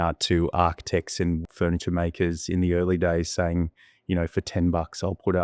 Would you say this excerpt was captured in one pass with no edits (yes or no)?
no